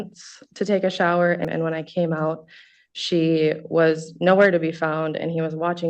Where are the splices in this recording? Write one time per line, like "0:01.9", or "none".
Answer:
0:01.4